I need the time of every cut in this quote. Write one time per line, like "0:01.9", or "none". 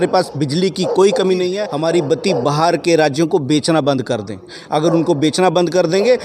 0:01.6